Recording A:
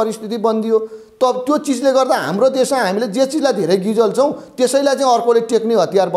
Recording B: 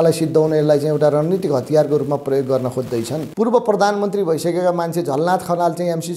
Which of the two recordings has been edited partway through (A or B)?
B